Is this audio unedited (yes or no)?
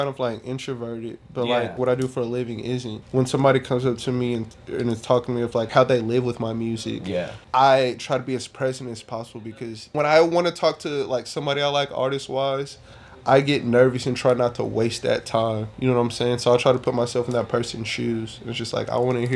no